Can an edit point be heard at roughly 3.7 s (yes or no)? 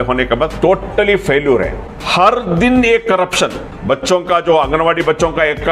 yes